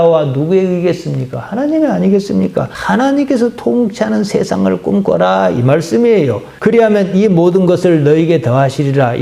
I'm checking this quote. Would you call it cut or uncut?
uncut